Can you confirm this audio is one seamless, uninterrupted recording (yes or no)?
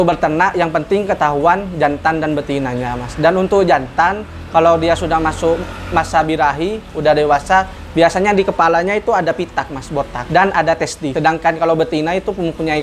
no